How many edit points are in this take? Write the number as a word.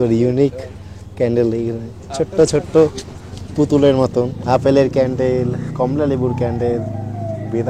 one